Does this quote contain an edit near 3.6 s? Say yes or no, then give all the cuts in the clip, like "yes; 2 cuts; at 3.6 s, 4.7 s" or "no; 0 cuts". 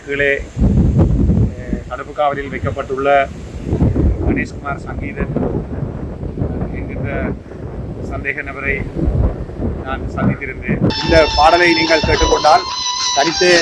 no; 1 cut; at 11.0 s